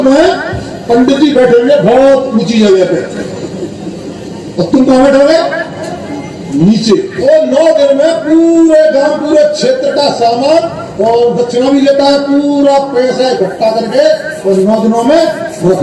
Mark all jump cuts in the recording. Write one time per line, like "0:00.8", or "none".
0:07.1